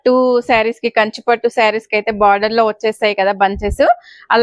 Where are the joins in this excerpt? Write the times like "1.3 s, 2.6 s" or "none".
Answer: none